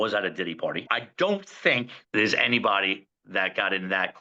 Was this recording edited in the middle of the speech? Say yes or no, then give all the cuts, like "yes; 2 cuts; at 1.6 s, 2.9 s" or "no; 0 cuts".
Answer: yes; 2 cuts; at 0.9 s, 2.0 s